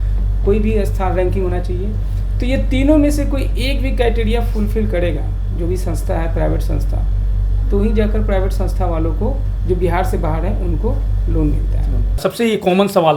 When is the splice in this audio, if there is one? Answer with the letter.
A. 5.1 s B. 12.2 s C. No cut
B